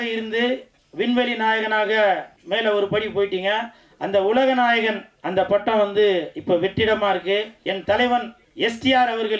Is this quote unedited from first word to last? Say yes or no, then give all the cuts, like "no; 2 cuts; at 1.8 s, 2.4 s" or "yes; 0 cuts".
no; 3 cuts; at 2.3 s, 7.6 s, 8.4 s